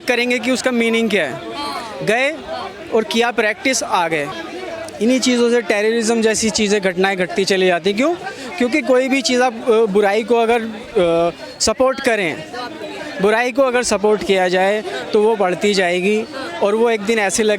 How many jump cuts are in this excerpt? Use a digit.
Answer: 1